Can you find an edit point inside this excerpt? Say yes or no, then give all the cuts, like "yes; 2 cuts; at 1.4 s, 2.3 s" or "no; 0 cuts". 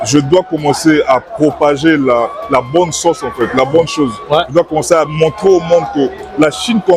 no; 0 cuts